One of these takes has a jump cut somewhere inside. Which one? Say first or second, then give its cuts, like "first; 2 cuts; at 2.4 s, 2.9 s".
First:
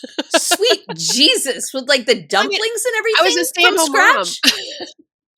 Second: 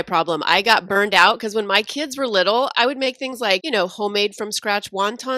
second; 2 cuts; at 2.7 s, 3.6 s